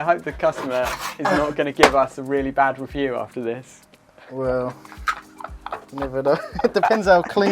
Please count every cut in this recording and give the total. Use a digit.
0